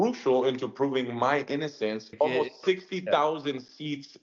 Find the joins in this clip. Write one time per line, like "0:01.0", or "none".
0:02.1